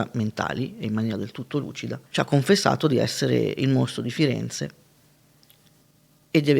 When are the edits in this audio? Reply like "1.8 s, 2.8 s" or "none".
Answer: 2.0 s